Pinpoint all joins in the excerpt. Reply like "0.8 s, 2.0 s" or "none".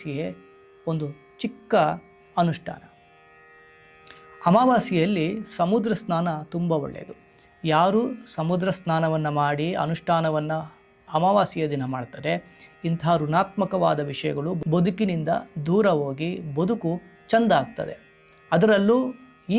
none

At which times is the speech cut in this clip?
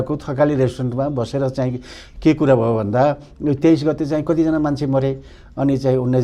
none

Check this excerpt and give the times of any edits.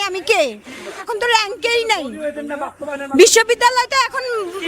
1.0 s

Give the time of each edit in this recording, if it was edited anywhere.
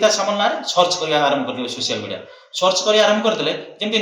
none

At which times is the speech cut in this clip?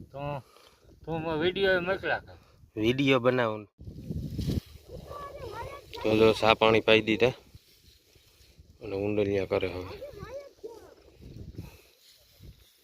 3.5 s

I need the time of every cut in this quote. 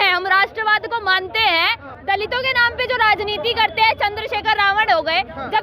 1.9 s

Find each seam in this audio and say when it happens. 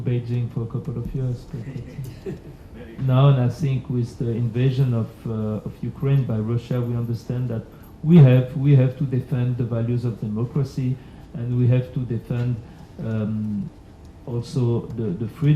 3.0 s

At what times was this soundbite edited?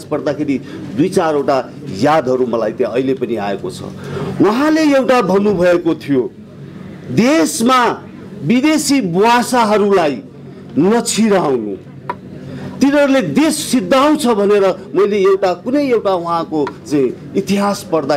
none

